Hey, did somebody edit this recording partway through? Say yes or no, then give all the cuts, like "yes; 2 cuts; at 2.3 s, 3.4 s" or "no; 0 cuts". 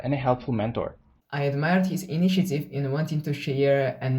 yes; 1 cut; at 1.2 s